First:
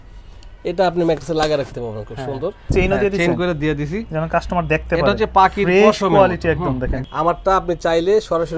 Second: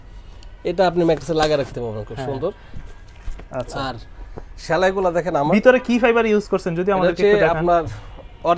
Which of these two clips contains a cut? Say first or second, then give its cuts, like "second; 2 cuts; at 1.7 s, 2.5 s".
first; 2 cuts; at 2.7 s, 7.0 s